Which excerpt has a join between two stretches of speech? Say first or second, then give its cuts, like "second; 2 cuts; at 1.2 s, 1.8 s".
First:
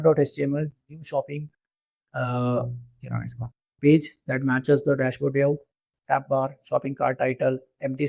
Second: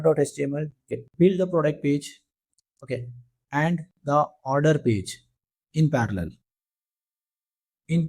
second; 1 cut; at 1.0 s